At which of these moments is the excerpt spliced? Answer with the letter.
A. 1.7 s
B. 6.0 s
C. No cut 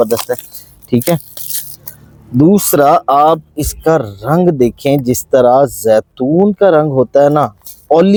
C